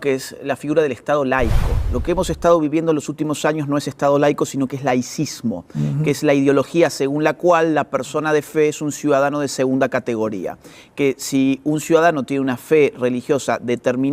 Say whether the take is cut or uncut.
cut